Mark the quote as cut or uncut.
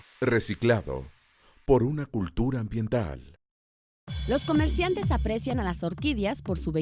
cut